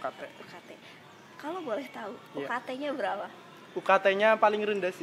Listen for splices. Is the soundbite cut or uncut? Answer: uncut